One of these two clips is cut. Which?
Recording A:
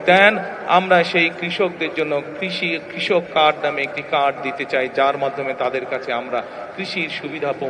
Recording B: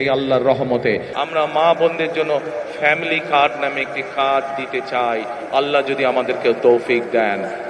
B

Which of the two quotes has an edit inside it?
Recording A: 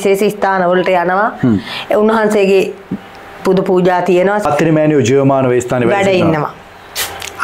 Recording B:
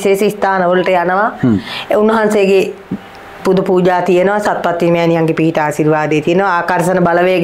A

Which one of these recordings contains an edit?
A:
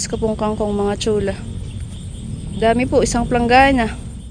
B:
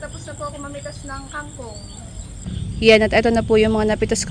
B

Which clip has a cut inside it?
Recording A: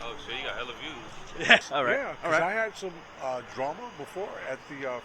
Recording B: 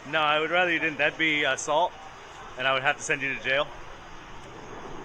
A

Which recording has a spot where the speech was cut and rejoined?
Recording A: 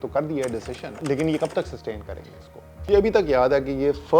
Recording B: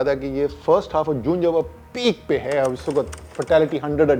A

